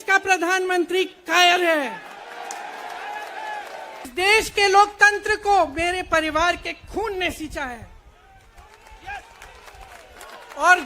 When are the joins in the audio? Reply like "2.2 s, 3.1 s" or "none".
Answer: 4.1 s